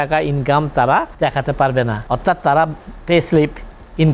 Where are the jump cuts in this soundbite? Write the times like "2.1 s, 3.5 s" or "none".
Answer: 1.1 s, 2.0 s